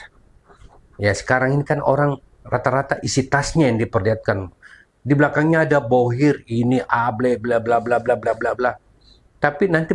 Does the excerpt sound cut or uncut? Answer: uncut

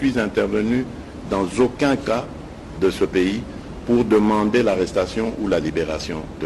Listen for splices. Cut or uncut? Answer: uncut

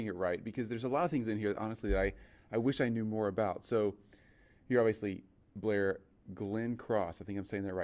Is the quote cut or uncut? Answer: uncut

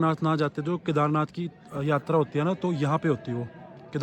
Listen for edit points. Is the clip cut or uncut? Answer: uncut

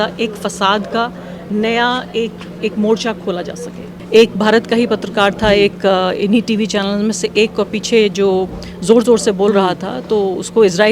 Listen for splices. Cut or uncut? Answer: cut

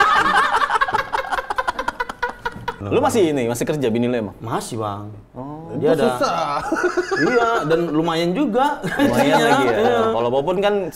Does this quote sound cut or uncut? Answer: cut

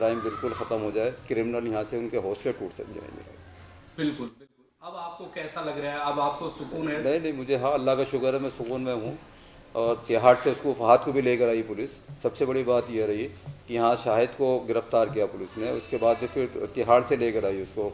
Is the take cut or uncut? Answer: uncut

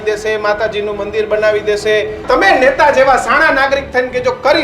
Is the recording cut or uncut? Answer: cut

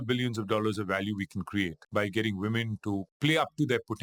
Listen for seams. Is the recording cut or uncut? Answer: cut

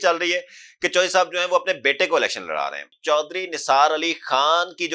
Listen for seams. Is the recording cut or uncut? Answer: cut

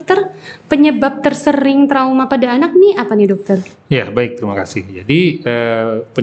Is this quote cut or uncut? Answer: uncut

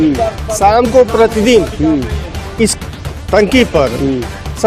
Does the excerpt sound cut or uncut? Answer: uncut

